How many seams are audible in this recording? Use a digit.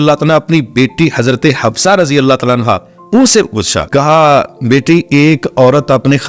1